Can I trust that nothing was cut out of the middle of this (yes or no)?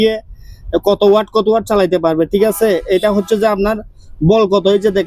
yes